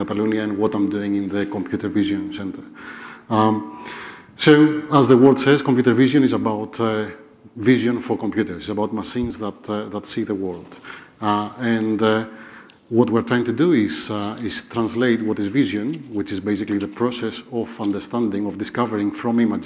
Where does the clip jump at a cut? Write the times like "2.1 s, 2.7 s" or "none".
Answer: 9.4 s